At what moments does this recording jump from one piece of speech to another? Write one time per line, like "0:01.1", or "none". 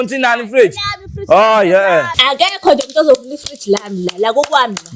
0:02.1